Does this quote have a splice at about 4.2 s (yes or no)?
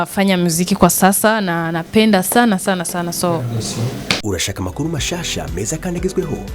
yes